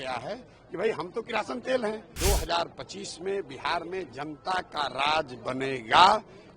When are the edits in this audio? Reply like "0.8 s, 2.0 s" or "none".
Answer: 2.1 s